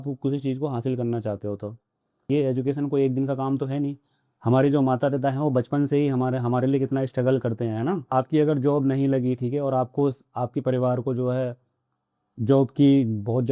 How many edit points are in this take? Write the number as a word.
one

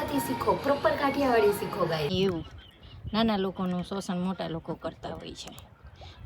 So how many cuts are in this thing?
one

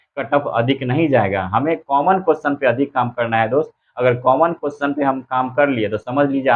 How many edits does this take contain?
zero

